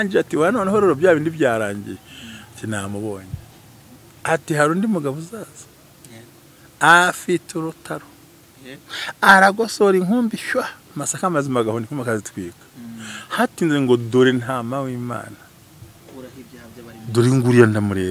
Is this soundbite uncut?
yes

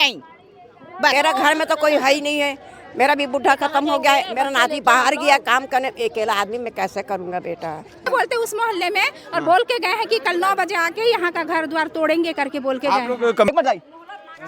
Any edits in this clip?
yes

